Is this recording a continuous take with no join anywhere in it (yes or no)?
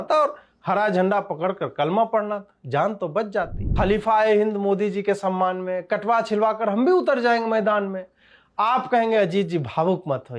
no